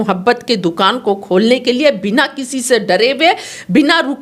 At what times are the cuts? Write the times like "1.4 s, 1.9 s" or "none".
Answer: none